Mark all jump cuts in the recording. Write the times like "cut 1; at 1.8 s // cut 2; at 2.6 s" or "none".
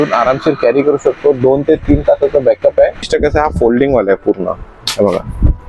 cut 1; at 3.1 s